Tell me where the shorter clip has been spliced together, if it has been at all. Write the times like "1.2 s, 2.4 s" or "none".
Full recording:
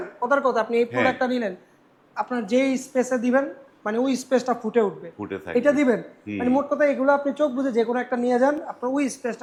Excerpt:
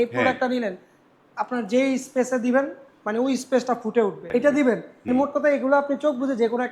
4.2 s, 4.9 s